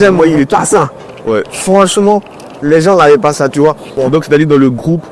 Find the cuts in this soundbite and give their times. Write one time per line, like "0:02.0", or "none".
none